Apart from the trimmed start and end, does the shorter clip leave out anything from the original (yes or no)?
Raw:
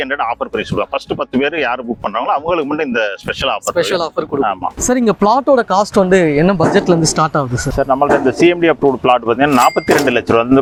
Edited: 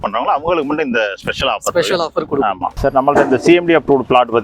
yes